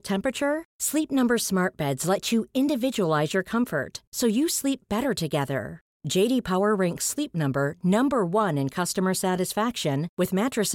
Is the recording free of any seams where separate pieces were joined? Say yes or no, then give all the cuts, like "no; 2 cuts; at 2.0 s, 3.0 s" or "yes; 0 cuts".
yes; 0 cuts